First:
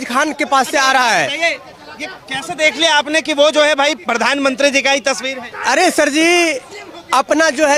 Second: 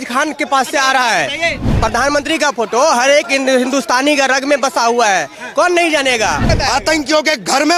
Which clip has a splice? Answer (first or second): second